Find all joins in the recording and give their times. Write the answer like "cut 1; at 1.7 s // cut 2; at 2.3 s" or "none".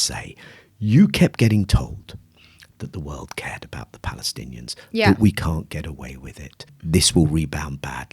cut 1; at 6.7 s